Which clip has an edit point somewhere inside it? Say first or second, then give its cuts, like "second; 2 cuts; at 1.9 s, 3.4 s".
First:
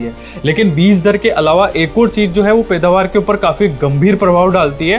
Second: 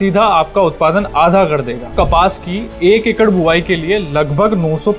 second; 1 cut; at 1.9 s